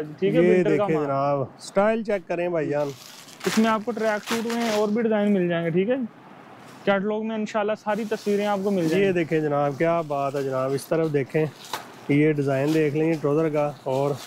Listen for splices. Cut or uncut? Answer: uncut